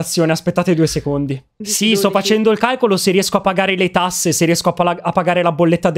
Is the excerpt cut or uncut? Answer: cut